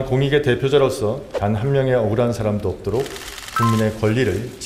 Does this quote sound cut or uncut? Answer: cut